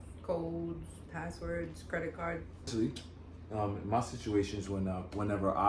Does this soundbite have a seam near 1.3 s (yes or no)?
no